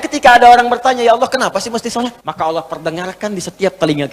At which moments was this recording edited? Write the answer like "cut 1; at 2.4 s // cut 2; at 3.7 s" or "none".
cut 1; at 2.2 s